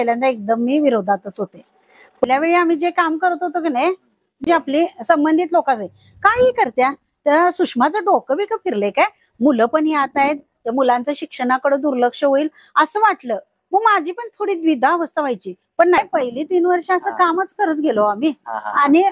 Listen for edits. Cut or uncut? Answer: cut